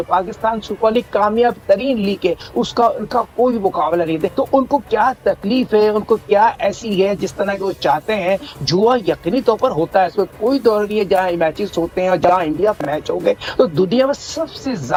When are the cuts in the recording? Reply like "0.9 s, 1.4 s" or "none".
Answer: none